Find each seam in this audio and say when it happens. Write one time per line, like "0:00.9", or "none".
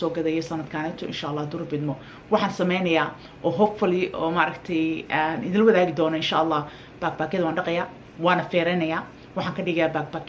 none